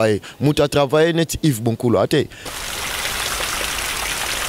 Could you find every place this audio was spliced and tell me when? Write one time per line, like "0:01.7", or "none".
0:02.4